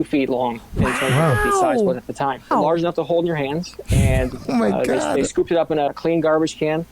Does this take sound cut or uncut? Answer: cut